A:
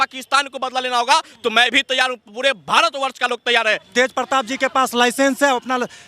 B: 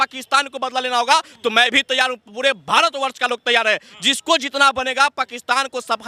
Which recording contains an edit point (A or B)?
A